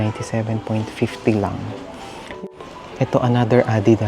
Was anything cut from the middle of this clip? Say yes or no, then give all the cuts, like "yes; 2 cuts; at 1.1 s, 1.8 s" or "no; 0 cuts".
yes; 1 cut; at 2.2 s